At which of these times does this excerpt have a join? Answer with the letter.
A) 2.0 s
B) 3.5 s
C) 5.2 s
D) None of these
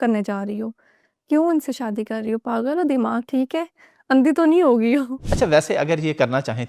C